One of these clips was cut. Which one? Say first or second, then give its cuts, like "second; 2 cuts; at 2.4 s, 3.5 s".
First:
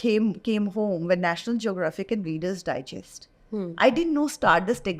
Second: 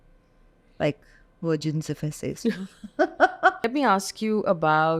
second; 1 cut; at 3.6 s